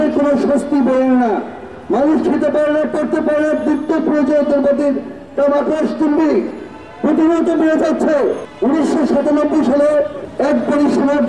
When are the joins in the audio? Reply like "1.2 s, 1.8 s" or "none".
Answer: 8.5 s, 10.2 s